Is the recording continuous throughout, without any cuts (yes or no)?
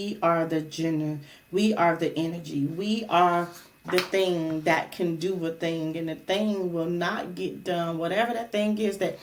yes